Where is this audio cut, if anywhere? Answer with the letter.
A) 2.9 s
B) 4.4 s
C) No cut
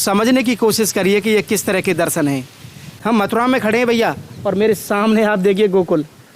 A